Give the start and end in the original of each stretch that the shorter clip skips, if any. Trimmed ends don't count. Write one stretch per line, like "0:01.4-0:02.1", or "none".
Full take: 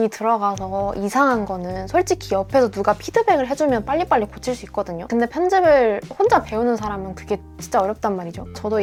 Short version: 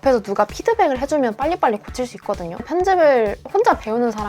0:05.1-0:05.3

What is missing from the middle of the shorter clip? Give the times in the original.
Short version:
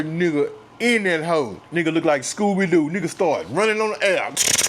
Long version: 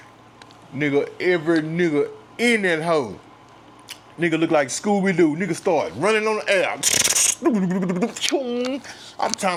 0:03.2-0:04.1

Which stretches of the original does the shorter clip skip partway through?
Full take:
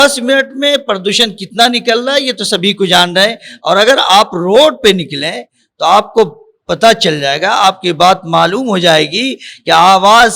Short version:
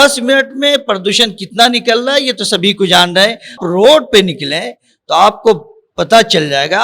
0:03.6-0:04.3

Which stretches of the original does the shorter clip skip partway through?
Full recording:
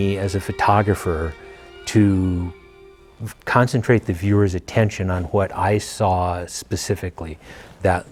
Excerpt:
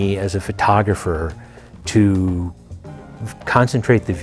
none

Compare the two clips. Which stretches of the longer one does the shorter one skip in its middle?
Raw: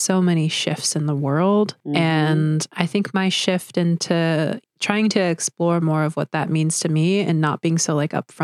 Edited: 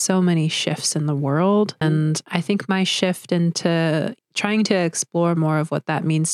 0:01.8-0:02.3

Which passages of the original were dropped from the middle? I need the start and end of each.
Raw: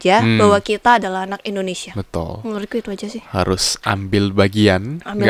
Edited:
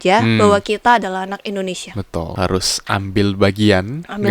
0:02.3-0:03.3

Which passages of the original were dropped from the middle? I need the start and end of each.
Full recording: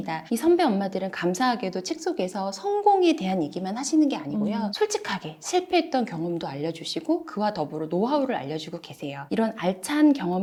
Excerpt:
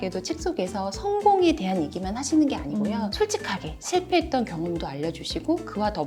none

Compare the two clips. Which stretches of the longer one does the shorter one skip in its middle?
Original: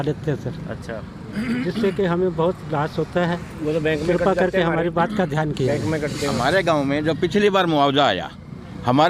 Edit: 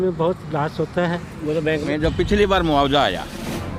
0:04.0-0:06.9

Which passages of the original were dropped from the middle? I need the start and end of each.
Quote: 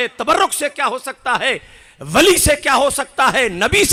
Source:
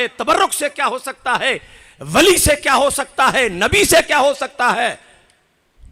none

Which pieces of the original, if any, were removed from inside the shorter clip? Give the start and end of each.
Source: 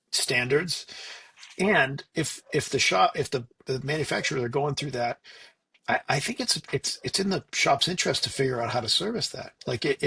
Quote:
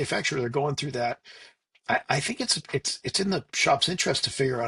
none

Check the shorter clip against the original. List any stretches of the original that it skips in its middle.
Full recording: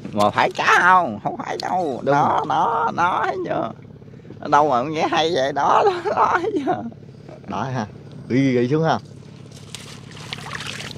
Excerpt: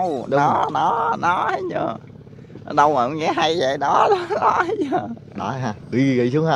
0:07.4-0:08.0

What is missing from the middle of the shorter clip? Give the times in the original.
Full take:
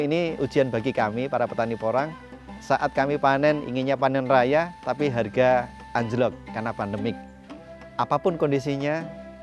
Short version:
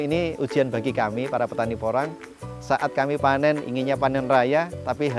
none

